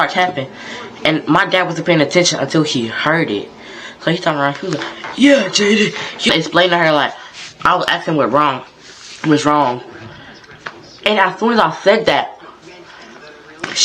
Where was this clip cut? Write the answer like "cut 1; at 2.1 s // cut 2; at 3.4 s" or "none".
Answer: cut 1; at 6.3 s

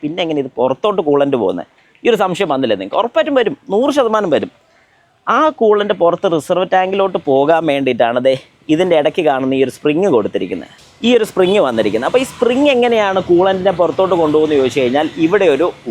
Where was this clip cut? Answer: none

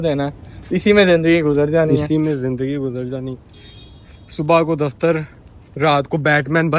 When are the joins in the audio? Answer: none

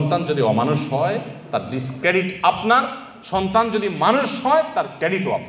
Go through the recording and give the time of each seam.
none

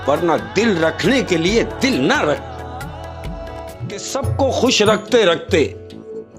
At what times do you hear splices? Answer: cut 1; at 3.8 s

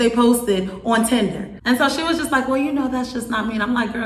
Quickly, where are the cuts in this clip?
cut 1; at 1.5 s

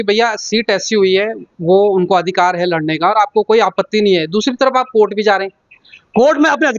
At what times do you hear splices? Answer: none

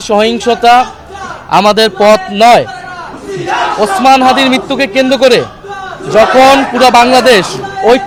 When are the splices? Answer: none

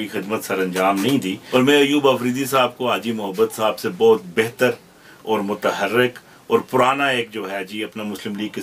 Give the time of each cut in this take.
cut 1; at 1.4 s

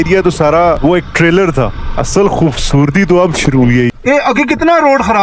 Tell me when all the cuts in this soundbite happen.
cut 1; at 0.8 s // cut 2; at 1.8 s // cut 3; at 3.9 s

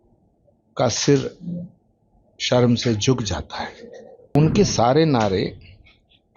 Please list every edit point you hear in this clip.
cut 1; at 4.3 s

